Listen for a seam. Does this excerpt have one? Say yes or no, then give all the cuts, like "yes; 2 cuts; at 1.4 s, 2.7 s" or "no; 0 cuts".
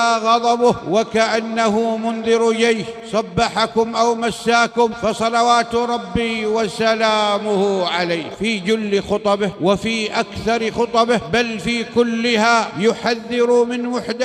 yes; 7 cuts; at 0.8 s, 2.9 s, 5.0 s, 8.3 s, 9.5 s, 11.3 s, 12.7 s